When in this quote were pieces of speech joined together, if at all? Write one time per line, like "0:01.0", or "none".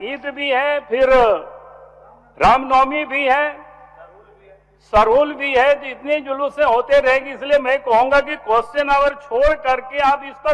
none